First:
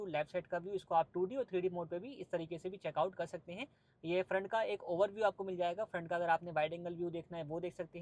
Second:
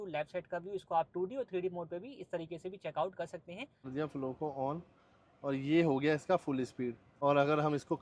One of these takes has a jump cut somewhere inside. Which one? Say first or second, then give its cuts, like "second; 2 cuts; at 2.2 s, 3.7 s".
second; 2 cuts; at 3.9 s, 7.0 s